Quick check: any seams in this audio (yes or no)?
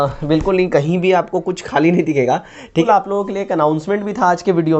yes